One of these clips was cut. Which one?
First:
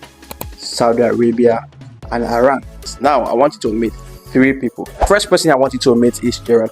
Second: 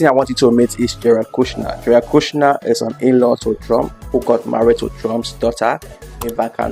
first; 1 cut; at 2.9 s

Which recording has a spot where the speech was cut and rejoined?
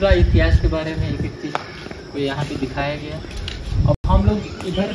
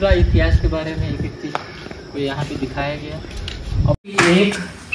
second; 1 cut; at 4.0 s

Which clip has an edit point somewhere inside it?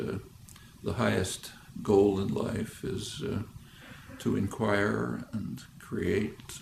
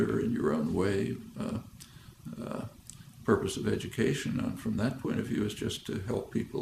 second; 1 cut; at 1.4 s

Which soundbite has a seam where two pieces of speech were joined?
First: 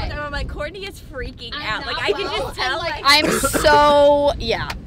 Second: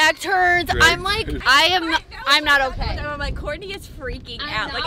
second; 1 cut; at 1.4 s

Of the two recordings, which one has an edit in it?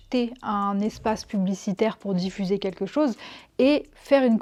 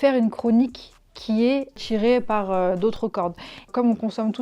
second; 2 cuts; at 1.8 s, 3.7 s

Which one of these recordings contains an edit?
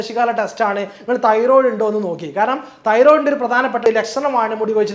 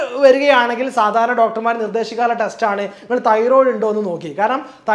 first; 1 cut; at 3.9 s

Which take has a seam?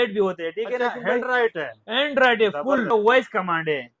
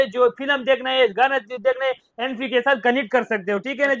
first; 1 cut; at 2.9 s

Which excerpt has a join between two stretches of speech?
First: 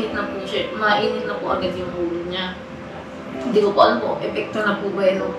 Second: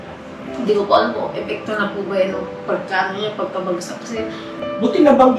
second; 1 cut; at 4.4 s

